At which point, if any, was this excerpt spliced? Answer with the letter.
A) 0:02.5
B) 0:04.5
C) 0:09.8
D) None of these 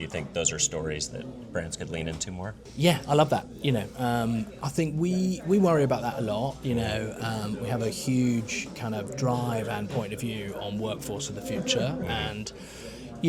A